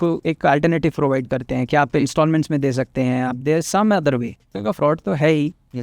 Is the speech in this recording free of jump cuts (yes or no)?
no